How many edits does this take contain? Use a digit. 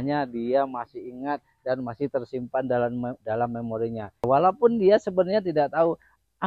1